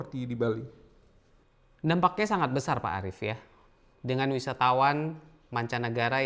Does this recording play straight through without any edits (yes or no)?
yes